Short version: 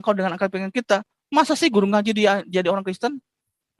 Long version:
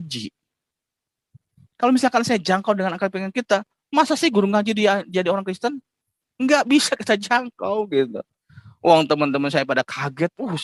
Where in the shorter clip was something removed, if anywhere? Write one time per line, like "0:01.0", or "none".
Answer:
none